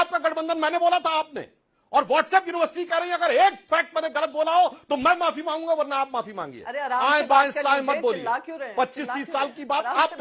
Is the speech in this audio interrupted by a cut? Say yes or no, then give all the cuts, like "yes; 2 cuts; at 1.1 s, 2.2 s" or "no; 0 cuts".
no; 0 cuts